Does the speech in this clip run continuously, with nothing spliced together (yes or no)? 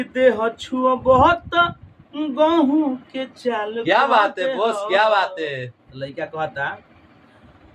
yes